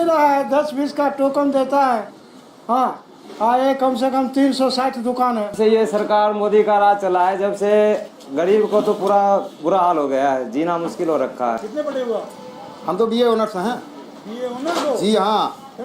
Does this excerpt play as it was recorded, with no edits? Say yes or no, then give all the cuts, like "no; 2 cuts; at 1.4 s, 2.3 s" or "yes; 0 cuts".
no; 2 cuts; at 5.5 s, 11.6 s